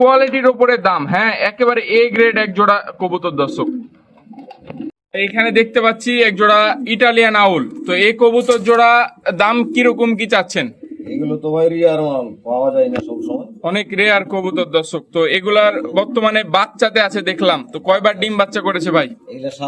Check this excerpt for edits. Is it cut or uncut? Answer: uncut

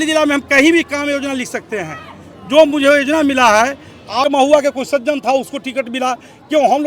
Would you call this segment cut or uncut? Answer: cut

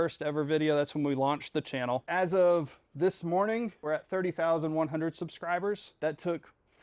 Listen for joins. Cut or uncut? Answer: cut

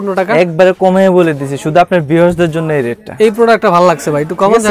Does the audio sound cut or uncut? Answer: uncut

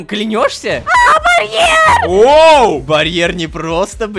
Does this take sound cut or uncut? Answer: cut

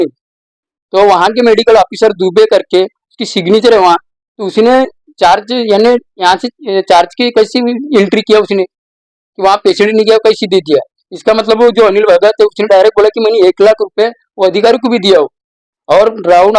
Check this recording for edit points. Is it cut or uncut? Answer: uncut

